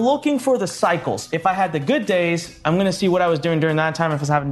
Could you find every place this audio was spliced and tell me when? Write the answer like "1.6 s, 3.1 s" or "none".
1.2 s